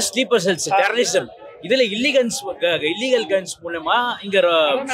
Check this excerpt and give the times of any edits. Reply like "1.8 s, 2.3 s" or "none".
none